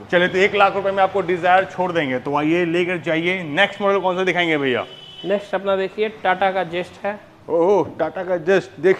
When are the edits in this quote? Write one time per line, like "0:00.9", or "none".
none